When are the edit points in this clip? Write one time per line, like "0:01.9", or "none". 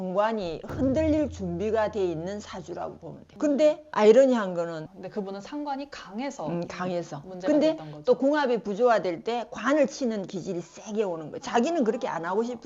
0:04.9

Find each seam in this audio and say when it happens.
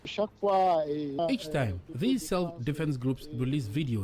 0:01.2

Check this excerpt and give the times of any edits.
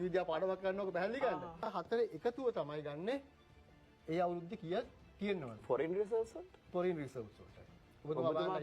0:01.7

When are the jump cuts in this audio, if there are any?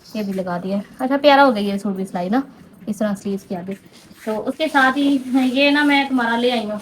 none

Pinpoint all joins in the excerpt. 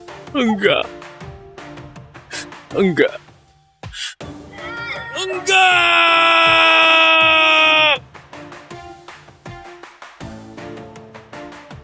0:08.0

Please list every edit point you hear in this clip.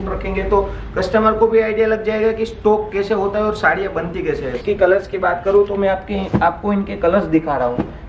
0:04.5

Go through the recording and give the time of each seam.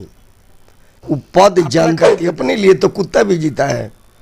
0:00.9
0:02.1

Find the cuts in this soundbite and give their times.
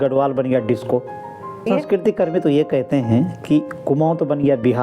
0:01.7

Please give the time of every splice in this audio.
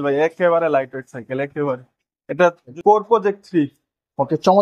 none

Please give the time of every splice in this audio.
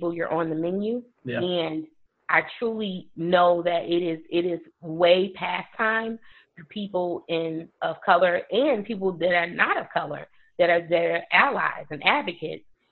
0:01.1

